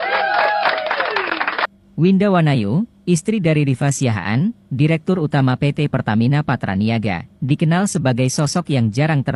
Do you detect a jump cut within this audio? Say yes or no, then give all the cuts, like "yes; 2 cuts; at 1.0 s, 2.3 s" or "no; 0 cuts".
yes; 1 cut; at 1.7 s